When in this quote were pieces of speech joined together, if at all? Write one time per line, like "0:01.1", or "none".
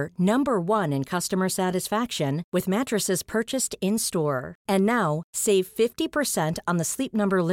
none